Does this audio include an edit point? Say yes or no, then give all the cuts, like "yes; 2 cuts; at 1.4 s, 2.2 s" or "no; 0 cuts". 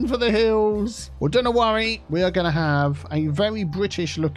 yes; 2 cuts; at 1.0 s, 2.0 s